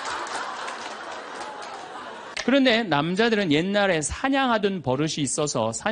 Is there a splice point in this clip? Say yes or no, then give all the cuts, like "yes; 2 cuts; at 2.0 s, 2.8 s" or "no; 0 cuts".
yes; 1 cut; at 2.2 s